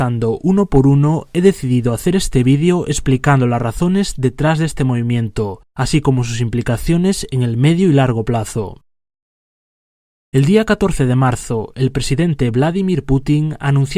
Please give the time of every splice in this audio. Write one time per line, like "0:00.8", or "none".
0:07.3